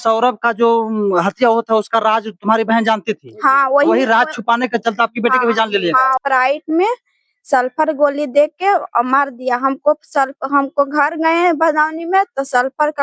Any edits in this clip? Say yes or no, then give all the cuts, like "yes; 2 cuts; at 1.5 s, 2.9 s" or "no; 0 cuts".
yes; 1 cut; at 6.2 s